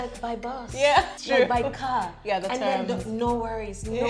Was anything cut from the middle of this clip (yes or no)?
yes